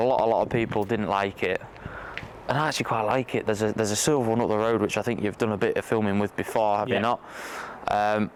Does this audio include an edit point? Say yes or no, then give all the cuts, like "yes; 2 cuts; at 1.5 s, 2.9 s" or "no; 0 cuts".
no; 0 cuts